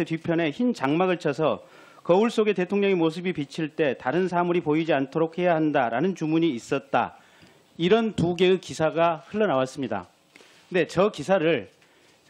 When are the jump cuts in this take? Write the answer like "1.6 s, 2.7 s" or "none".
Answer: 7.7 s